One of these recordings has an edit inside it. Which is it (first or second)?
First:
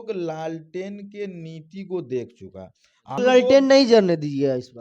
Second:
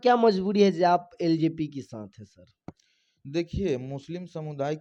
first